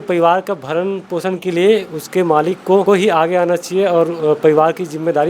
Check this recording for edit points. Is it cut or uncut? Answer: cut